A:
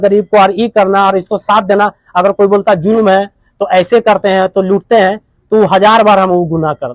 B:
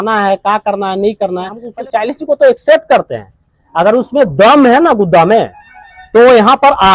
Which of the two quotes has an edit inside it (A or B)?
B